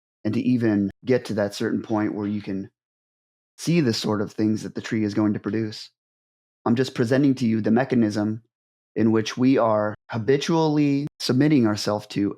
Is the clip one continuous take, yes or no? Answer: no